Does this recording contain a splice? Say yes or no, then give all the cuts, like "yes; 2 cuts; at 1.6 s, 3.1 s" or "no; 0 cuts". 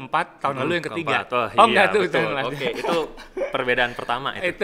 no; 0 cuts